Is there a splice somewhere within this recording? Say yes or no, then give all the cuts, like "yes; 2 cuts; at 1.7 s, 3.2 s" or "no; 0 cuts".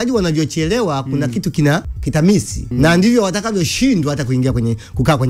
yes; 2 cuts; at 2.0 s, 2.7 s